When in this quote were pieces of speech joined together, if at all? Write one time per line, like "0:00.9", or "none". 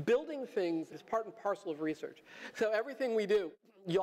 0:00.9